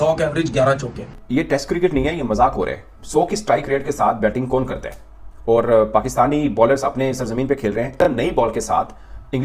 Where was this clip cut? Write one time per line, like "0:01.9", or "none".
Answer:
0:01.2